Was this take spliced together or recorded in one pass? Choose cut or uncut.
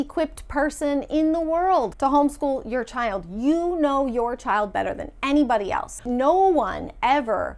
cut